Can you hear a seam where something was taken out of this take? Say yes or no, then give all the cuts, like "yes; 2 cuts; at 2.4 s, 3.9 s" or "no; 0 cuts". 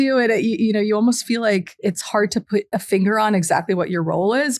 yes; 2 cuts; at 1.7 s, 2.7 s